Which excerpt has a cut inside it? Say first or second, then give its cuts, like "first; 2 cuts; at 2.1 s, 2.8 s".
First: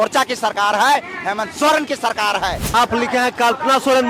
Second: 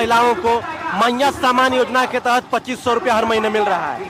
first; 1 cut; at 2.7 s